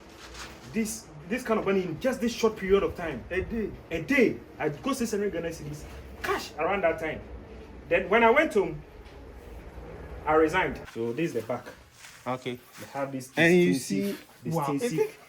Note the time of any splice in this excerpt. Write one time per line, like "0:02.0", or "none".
0:10.8